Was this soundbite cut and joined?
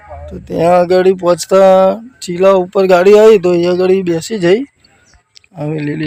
no; 0 cuts

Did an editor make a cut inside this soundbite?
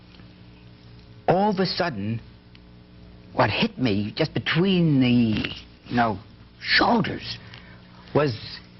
yes; 1 cut; at 3.7 s

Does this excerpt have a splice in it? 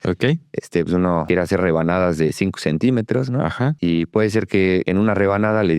yes; 3 cuts; at 1.2 s, 3.8 s, 4.9 s

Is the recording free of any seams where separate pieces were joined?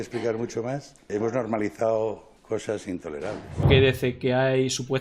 no; 3 cuts; at 1.1 s, 2.3 s, 3.7 s

